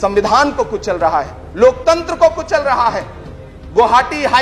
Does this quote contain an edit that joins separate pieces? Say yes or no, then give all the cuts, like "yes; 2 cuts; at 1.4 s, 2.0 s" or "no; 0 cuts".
no; 0 cuts